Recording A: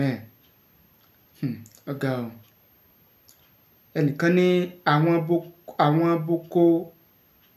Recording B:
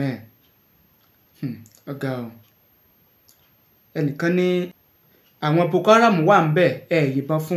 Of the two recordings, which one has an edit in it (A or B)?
B